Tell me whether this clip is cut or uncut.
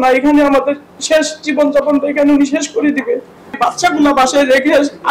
cut